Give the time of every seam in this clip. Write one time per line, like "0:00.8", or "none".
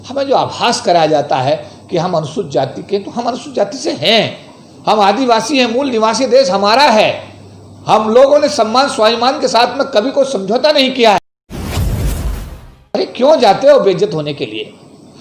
0:11.2
0:12.8